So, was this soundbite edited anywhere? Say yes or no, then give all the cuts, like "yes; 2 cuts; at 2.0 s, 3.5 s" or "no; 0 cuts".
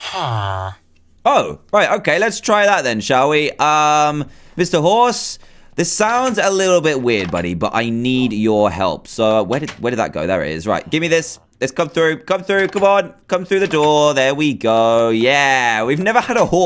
no; 0 cuts